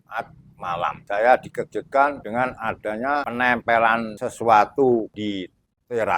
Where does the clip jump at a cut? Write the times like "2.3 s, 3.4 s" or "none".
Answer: 1.0 s, 2.2 s, 3.3 s, 4.2 s, 5.1 s

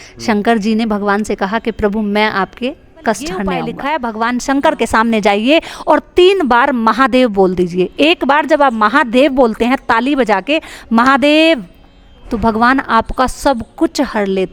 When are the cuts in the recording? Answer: 3.7 s

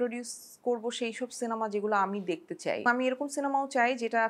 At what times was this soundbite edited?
2.8 s

